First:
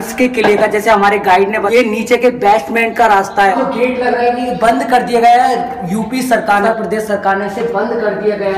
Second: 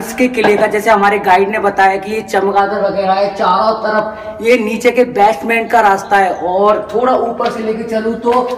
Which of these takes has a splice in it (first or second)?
first